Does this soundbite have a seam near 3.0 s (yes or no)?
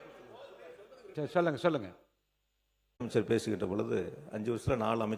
yes